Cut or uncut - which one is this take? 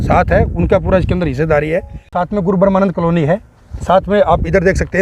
cut